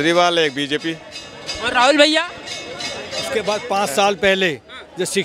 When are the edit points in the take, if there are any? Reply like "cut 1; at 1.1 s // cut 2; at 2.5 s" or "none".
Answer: cut 1; at 3.4 s